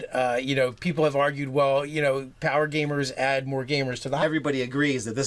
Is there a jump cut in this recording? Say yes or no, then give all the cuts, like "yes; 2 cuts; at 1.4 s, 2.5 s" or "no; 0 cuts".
no; 0 cuts